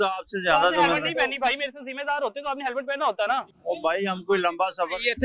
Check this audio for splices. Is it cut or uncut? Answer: cut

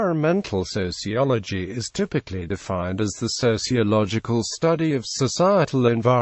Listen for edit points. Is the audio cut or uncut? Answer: cut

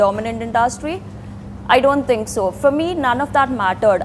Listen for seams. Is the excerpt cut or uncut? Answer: uncut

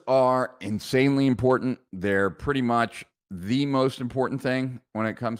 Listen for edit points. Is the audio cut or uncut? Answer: uncut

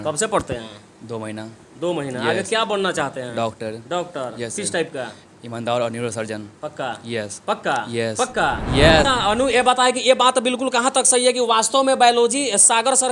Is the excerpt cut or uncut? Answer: cut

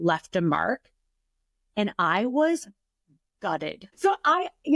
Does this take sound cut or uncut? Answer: cut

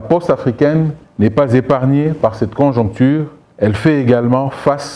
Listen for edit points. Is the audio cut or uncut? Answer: cut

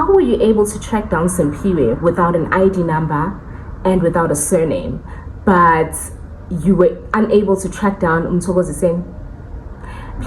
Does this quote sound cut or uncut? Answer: uncut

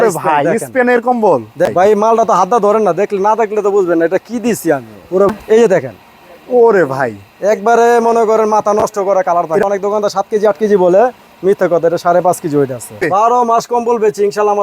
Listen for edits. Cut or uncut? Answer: cut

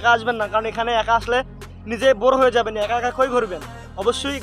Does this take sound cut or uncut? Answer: uncut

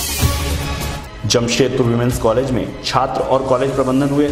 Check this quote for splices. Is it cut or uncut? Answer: cut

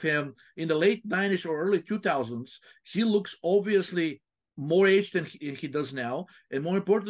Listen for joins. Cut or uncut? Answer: uncut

